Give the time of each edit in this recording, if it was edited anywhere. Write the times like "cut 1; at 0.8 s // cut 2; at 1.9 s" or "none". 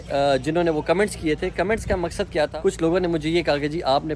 cut 1; at 2.5 s